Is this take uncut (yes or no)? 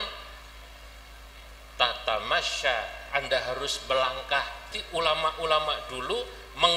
no